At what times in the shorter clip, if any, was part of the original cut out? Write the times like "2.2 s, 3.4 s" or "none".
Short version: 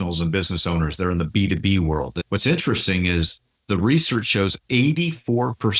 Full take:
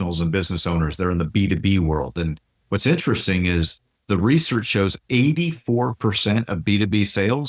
2.2 s